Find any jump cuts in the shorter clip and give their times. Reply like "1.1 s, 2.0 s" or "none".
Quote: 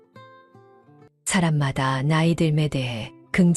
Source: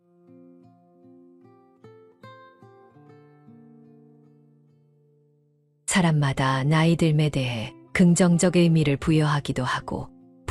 1.1 s